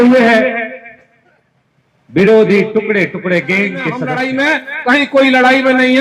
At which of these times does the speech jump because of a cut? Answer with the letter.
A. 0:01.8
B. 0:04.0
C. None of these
B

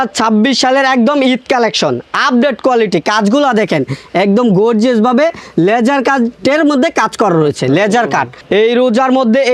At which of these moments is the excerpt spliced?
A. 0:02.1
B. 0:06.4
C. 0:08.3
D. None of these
C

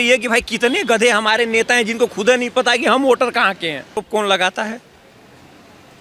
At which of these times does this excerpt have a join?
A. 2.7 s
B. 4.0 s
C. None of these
B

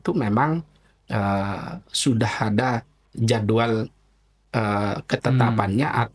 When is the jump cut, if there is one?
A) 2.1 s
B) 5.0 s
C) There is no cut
C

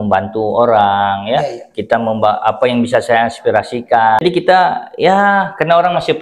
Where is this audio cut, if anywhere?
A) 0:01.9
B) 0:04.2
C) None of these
B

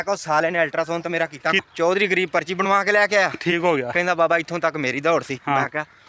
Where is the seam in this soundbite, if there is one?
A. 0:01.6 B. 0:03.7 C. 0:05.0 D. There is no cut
A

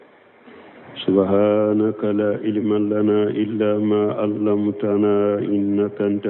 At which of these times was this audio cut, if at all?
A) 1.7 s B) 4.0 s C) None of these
C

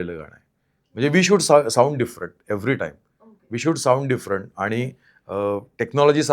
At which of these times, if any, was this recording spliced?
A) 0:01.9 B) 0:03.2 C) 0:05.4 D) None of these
D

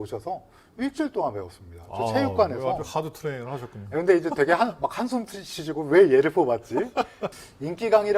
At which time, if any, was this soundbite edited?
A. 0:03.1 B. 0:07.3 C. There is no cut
B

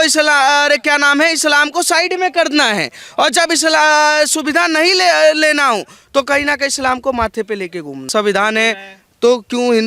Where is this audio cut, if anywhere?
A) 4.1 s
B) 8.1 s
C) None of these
B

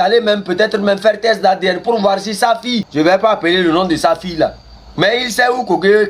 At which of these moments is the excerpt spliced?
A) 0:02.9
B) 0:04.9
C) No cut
A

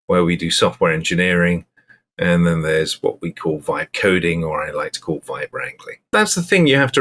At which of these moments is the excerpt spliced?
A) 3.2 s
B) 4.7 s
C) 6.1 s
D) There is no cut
C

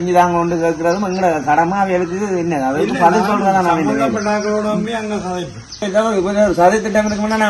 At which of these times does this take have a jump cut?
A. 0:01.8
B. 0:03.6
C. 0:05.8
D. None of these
C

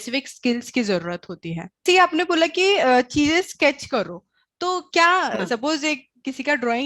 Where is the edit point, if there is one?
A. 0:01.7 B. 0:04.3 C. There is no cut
A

